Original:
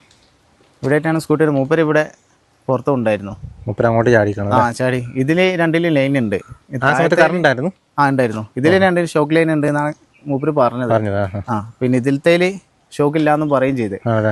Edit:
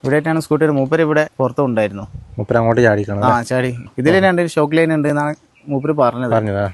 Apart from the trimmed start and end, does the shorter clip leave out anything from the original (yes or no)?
yes